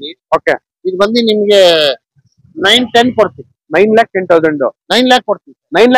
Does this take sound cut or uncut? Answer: uncut